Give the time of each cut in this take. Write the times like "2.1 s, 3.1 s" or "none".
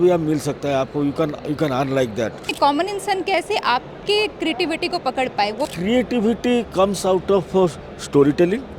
2.5 s, 5.7 s

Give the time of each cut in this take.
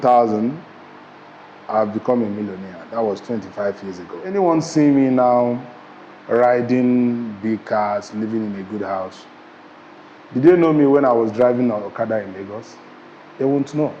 4.3 s

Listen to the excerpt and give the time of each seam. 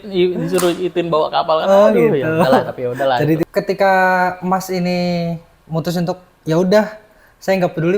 3.4 s

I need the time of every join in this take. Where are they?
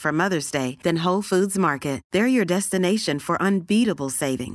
none

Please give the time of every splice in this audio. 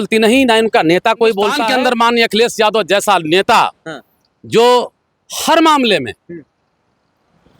1.6 s

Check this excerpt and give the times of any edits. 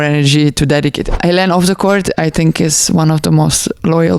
1.2 s

